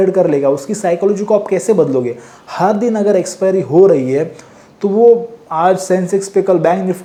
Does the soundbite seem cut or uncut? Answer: uncut